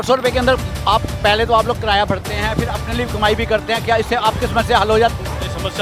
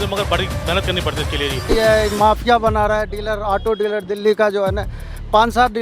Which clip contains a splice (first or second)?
second